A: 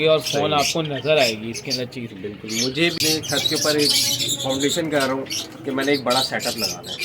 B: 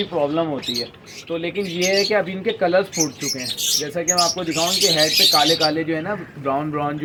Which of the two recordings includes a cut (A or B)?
A